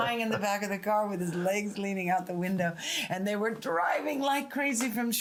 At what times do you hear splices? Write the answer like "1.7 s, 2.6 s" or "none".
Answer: none